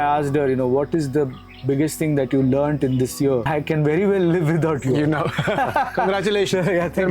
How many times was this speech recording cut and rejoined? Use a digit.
1